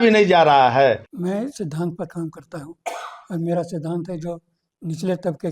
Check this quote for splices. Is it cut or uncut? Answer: cut